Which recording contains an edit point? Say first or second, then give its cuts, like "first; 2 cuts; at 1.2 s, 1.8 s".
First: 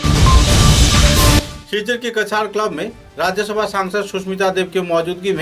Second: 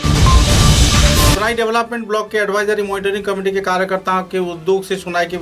second; 1 cut; at 1.4 s